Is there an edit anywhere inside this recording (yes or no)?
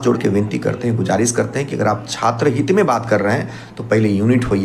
no